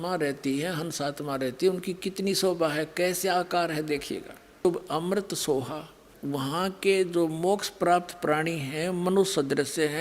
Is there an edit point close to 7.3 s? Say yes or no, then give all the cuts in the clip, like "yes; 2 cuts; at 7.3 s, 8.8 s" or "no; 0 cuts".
no; 1 cut; at 4.6 s